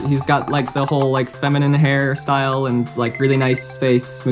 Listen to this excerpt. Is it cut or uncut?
uncut